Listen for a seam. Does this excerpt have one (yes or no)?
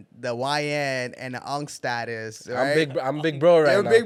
no